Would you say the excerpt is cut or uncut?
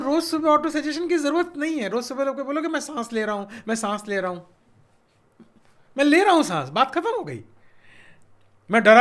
uncut